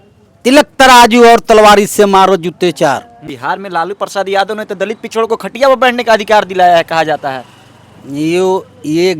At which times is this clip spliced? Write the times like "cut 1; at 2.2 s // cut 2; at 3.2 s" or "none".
cut 1; at 3.3 s